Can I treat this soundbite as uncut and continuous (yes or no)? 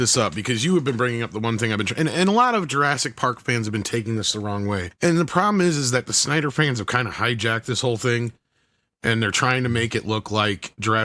no